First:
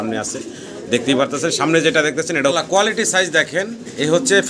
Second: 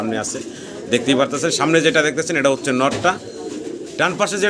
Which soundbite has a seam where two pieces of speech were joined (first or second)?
first